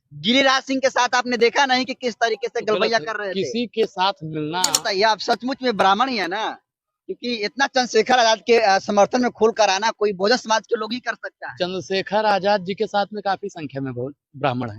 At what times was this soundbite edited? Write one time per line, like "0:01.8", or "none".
0:04.6